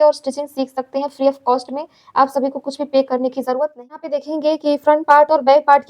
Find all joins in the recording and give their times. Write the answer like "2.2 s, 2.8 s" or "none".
4.2 s